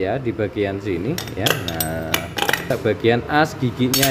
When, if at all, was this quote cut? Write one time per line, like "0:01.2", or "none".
0:02.7